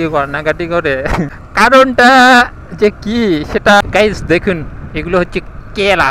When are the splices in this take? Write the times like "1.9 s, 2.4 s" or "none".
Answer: 1.4 s, 3.8 s